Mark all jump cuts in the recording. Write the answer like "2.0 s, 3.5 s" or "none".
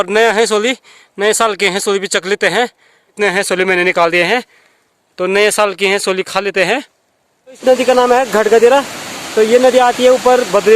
3.1 s, 7.6 s